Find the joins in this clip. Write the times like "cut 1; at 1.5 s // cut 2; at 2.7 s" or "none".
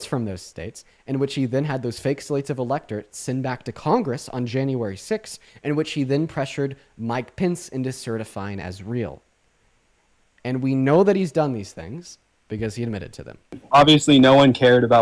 cut 1; at 13.6 s